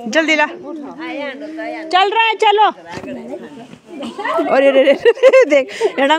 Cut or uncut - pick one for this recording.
uncut